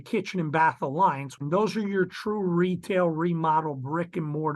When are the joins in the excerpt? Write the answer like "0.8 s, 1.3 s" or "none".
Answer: 1.4 s